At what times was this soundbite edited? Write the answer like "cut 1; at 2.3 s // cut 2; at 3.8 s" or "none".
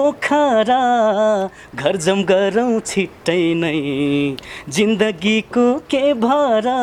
none